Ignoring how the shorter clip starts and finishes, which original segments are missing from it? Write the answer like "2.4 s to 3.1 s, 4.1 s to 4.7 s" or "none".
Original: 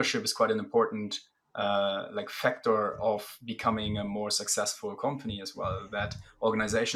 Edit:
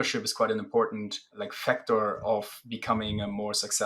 1.4 s to 2.1 s